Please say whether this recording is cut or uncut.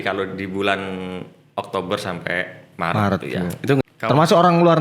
cut